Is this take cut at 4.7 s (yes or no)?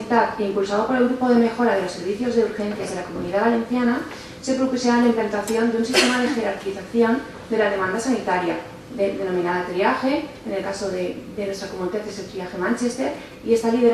yes